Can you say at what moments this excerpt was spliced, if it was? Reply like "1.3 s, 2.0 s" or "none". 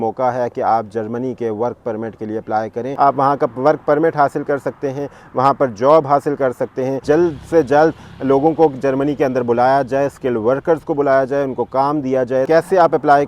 2.8 s, 7.0 s, 12.5 s